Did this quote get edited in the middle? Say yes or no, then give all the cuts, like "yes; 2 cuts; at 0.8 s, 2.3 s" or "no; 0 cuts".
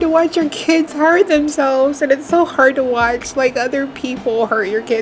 no; 0 cuts